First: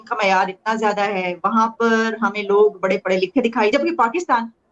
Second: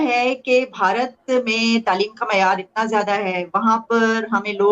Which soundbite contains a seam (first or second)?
first